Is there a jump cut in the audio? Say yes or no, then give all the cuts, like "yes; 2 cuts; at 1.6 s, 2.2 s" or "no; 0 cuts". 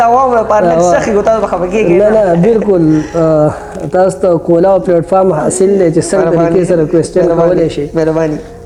no; 0 cuts